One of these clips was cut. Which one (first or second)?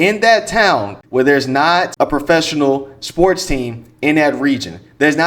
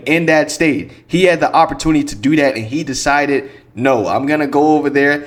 first